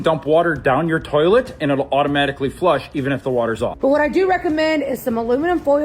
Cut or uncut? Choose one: cut